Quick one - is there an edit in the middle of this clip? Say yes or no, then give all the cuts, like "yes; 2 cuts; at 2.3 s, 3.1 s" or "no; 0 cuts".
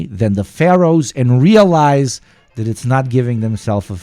no; 0 cuts